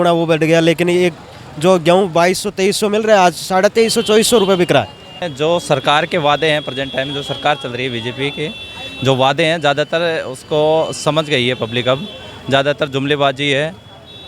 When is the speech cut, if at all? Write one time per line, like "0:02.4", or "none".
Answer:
0:05.2